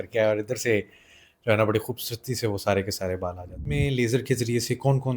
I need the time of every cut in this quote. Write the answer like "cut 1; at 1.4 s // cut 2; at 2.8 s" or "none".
cut 1; at 3.6 s